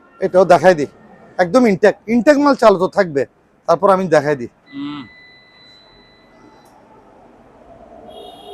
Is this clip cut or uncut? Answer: uncut